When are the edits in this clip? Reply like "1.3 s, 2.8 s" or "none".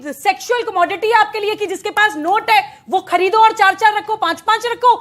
none